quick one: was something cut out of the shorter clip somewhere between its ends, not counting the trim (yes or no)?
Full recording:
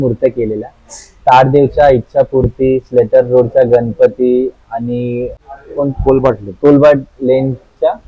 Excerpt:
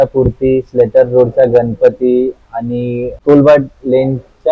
yes